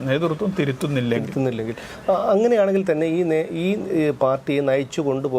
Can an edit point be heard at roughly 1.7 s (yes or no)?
no